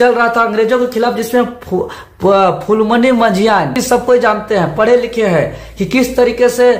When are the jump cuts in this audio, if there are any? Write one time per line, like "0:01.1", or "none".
0:03.8

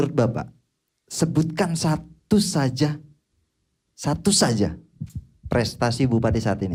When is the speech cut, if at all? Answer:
none

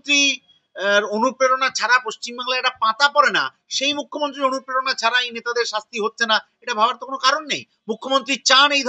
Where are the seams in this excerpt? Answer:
none

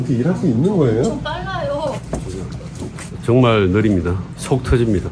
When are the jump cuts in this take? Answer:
0:02.0
0:03.1

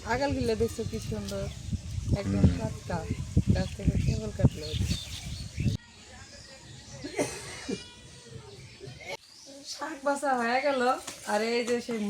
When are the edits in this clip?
0:05.8
0:09.2

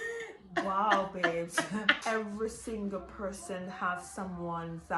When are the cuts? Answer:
0:02.0

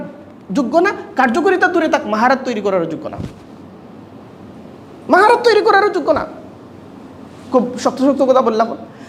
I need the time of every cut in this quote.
none

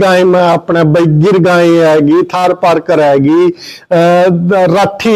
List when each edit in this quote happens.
none

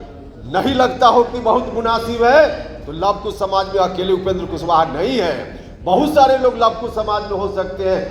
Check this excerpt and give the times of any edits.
none

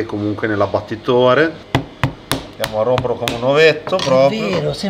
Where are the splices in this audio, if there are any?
0:01.6

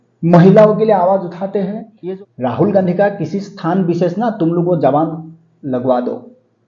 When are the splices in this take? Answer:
0:01.9

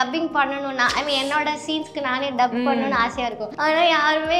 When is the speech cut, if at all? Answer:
0:03.5

